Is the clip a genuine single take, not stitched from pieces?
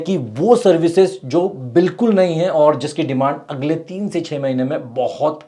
yes; 0 cuts

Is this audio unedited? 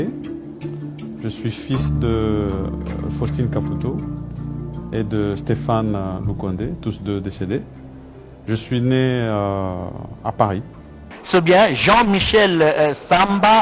no; 1 cut; at 11.1 s

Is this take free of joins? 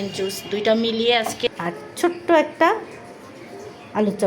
no; 1 cut; at 1.5 s

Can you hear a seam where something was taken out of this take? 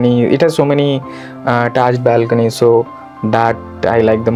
no; 0 cuts

